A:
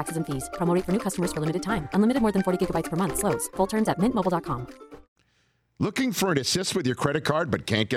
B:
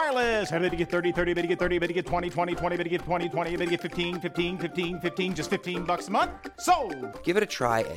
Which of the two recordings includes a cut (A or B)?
A